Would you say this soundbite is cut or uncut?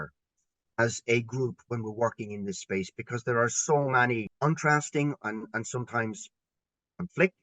cut